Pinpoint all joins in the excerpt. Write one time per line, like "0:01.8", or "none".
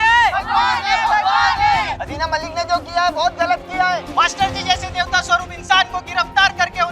none